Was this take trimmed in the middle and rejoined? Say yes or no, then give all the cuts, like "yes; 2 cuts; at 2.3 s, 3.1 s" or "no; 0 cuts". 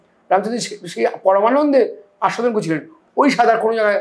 no; 0 cuts